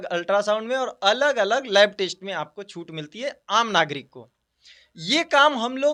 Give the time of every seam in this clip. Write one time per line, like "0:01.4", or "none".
none